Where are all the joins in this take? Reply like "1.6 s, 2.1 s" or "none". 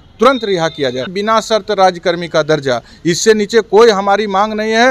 1.1 s